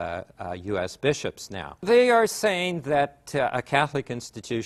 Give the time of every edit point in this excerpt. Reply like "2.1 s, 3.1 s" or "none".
none